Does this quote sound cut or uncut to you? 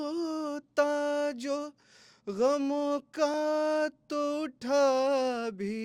uncut